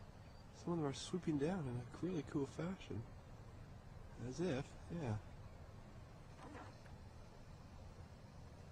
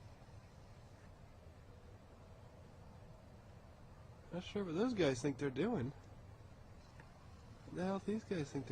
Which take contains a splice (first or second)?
second